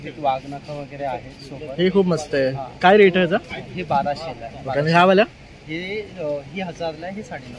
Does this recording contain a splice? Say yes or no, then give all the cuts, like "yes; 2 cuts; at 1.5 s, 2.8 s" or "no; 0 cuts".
no; 0 cuts